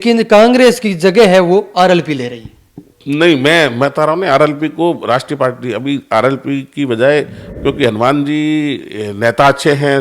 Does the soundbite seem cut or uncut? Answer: cut